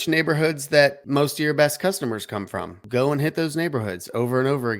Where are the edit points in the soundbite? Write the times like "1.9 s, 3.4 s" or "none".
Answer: 1.0 s, 2.8 s